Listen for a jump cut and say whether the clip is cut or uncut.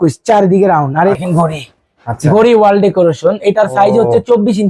cut